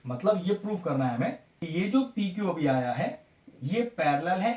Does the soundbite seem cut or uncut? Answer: cut